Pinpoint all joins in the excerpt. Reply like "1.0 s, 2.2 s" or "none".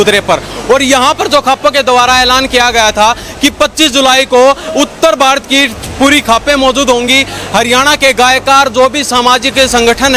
none